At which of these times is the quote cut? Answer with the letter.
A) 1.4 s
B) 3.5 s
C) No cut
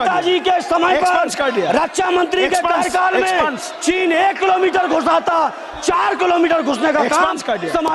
C